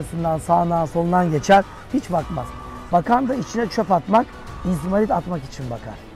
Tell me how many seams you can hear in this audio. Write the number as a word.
zero